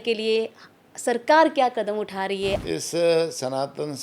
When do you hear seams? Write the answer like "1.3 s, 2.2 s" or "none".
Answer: 2.6 s